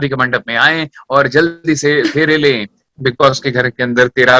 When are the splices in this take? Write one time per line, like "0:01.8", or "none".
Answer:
0:02.8